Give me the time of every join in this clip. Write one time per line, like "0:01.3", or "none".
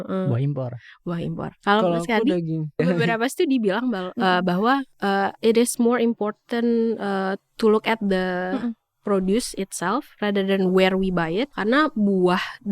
0:02.8
0:11.5